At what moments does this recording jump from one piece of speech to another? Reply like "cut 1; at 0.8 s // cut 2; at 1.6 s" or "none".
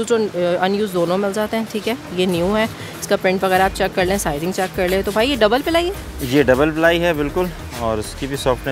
none